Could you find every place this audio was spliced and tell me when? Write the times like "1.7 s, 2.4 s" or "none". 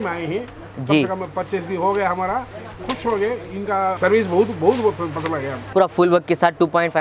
4.0 s, 5.6 s

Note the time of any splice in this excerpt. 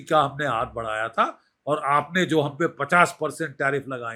none

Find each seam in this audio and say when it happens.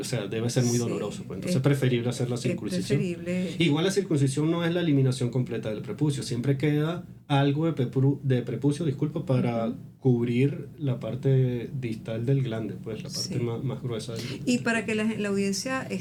none

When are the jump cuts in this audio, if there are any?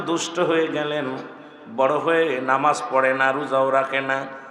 none

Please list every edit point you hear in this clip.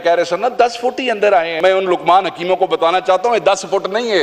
1.5 s

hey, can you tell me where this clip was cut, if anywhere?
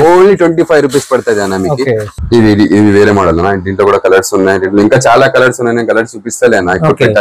2.1 s

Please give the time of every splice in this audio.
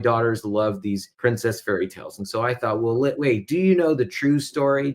1.1 s

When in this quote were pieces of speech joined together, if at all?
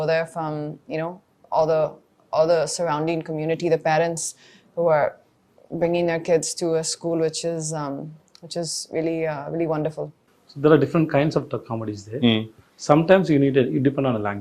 10.2 s

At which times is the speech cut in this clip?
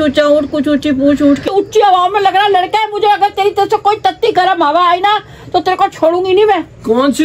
1.5 s

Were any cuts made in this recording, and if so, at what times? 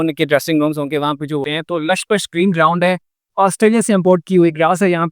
1.5 s

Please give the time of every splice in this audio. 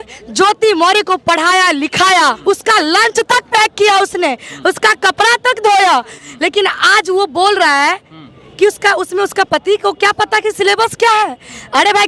2.4 s, 6.2 s

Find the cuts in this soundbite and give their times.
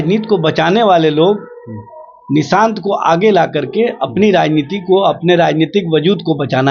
none

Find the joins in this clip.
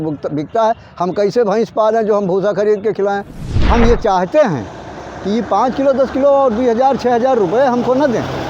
3.6 s

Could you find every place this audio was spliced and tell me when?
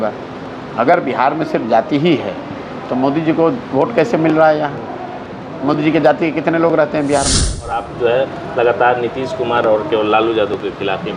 7.9 s

